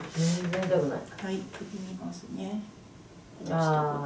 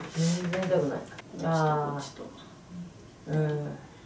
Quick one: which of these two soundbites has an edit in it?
second; 1 cut; at 1.1 s

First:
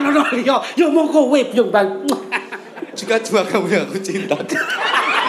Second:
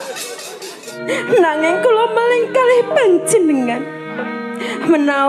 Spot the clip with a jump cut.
second; 1 cut; at 1.0 s

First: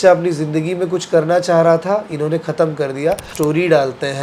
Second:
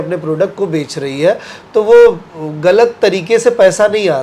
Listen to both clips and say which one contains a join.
first; 1 cut; at 3.3 s

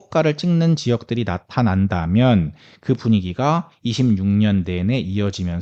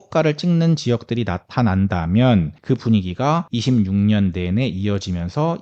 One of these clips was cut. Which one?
second; 2 cuts; at 2.5 s, 3.5 s

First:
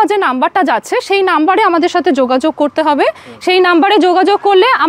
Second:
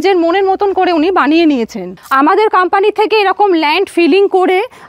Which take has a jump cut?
second; 1 cut; at 2.0 s

